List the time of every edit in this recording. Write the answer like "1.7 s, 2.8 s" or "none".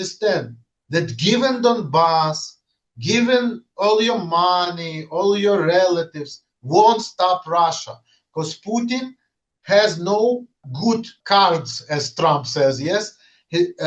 11.1 s